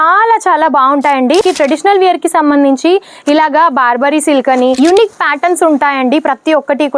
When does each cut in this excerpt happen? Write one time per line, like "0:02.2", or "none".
0:01.4
0:04.8